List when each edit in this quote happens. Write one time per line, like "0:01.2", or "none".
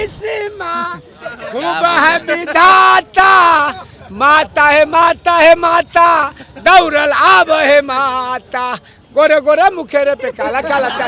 none